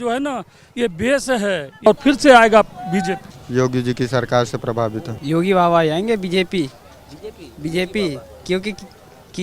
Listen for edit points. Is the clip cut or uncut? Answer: cut